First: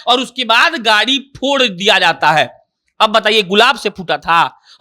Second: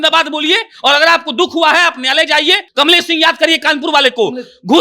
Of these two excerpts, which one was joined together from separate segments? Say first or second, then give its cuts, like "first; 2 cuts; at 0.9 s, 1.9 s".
second; 1 cut; at 2.6 s